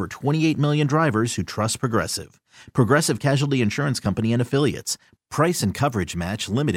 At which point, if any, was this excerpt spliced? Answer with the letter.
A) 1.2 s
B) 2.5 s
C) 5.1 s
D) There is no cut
D